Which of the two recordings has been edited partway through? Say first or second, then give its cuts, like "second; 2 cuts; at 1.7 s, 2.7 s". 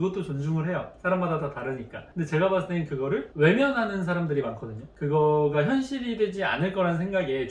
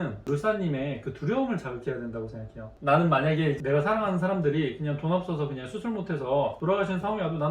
second; 2 cuts; at 2.6 s, 3.6 s